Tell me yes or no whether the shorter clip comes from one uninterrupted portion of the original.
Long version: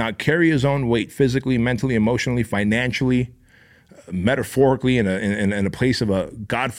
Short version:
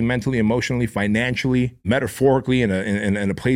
no